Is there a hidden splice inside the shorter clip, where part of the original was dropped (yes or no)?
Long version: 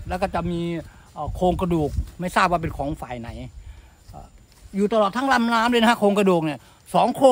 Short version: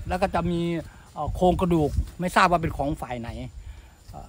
no